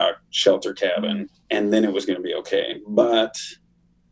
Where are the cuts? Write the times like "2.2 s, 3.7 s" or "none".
1.3 s